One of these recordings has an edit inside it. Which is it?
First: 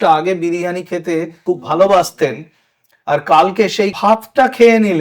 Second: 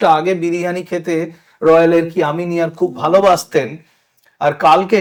first; 2 cuts; at 1.4 s, 3.9 s

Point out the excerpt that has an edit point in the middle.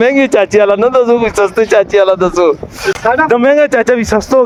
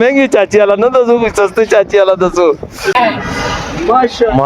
second; 1 cut; at 2.9 s

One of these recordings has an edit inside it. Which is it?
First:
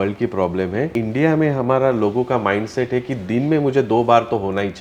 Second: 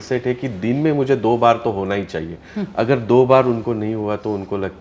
first; 1 cut; at 0.9 s

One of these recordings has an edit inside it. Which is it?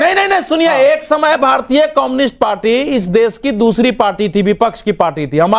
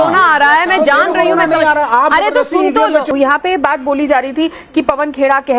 second; 1 cut; at 3.1 s

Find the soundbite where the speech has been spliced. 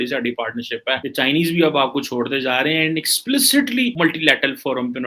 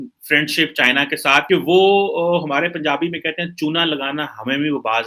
first; 1 cut; at 1.0 s

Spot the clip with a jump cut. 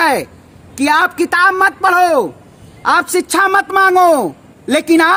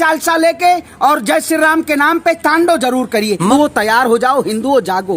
second; 1 cut; at 3.5 s

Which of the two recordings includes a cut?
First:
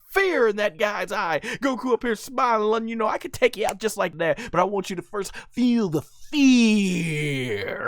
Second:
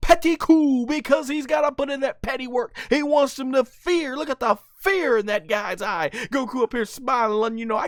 first; 1 cut; at 4.1 s

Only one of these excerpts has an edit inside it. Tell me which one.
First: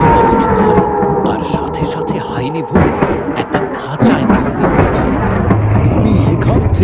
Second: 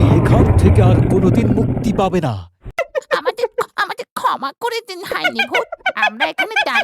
second; 1 cut; at 2.6 s

